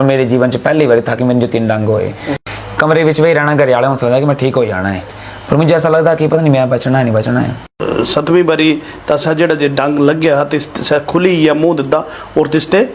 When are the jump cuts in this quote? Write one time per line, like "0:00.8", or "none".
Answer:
0:02.3
0:07.8